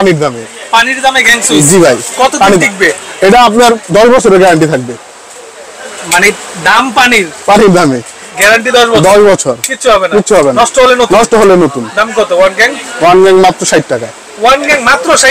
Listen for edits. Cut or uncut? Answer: uncut